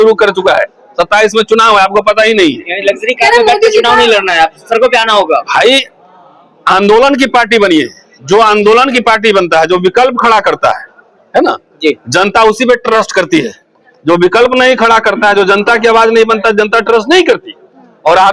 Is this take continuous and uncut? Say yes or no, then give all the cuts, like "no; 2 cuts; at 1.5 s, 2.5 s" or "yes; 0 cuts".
yes; 0 cuts